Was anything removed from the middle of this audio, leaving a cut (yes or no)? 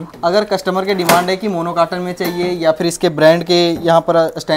no